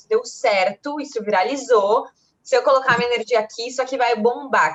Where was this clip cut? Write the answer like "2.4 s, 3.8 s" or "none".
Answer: none